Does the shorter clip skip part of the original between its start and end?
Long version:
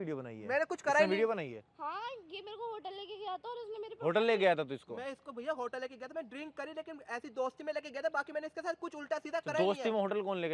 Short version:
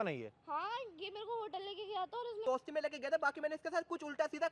yes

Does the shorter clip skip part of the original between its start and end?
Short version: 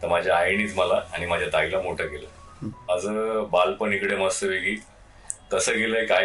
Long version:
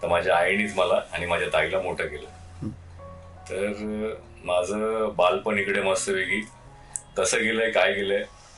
yes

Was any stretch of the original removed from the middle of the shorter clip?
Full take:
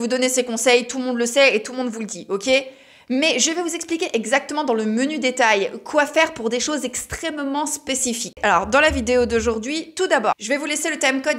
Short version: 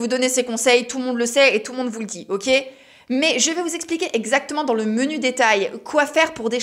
no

